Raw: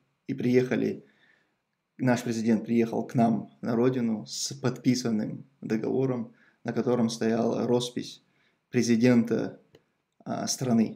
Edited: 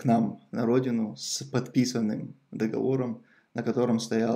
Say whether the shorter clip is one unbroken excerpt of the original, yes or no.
yes